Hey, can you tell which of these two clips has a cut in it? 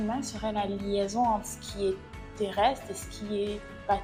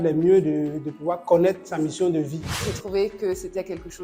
second; 2 cuts; at 1.7 s, 2.7 s

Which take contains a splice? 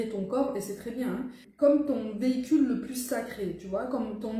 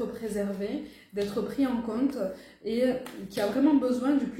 first; 1 cut; at 1.4 s

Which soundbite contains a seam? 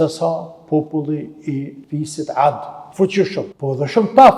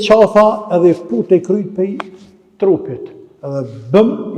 first; 3 cuts; at 1.8 s, 2.8 s, 3.5 s

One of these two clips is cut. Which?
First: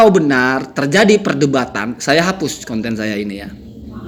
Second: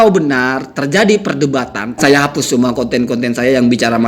second; 1 cut; at 2.0 s

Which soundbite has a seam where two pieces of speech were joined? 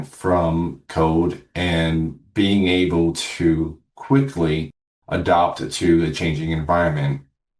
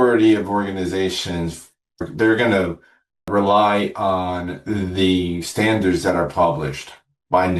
second; 1 cut; at 2.0 s

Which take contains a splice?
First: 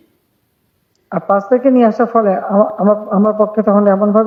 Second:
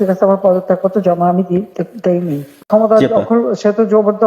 second; 1 cut; at 2.6 s

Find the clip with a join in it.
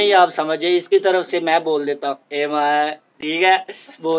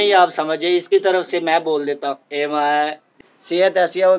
second; 1 cut; at 3.1 s

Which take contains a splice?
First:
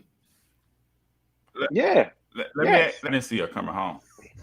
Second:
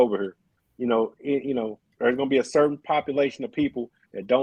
first; 1 cut; at 3.1 s

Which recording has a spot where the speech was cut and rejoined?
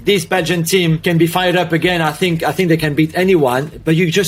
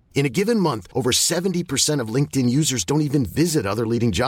first; 1 cut; at 1.0 s

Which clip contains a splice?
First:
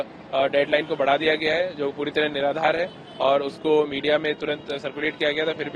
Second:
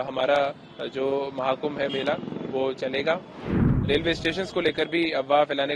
second; 1 cut; at 3.9 s

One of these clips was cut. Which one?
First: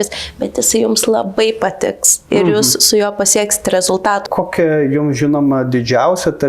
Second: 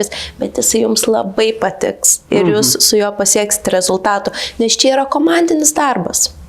first; 1 cut; at 4.3 s

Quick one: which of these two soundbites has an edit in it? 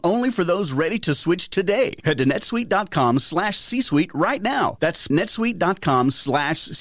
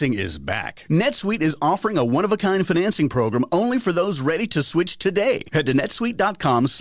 first; 1 cut; at 5.1 s

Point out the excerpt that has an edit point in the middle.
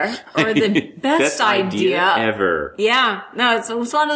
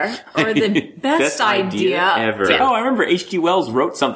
second; 1 cut; at 2.5 s

